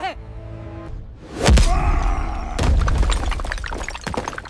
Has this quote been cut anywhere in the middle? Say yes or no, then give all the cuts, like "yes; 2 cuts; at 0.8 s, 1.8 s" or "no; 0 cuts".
yes; 1 cut; at 0.9 s